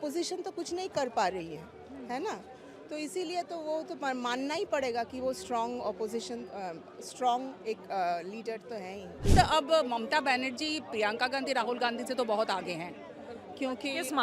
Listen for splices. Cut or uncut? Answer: cut